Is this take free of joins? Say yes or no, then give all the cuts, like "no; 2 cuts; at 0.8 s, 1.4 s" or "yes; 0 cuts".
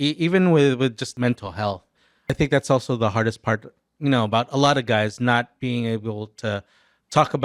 no; 2 cuts; at 1.1 s, 2.3 s